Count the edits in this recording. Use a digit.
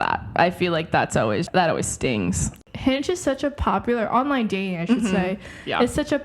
2